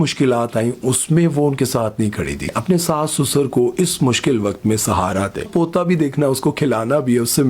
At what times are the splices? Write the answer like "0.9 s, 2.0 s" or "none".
2.5 s, 5.5 s